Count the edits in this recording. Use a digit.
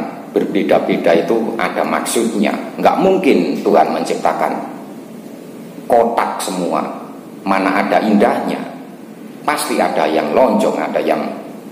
0